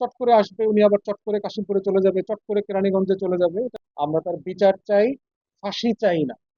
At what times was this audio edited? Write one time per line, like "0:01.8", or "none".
0:03.8